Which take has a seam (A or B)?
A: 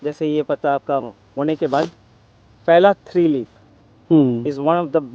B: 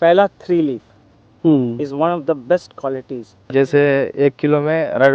B